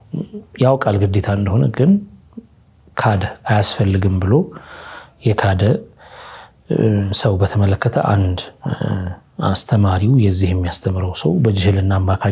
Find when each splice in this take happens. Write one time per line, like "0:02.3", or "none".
none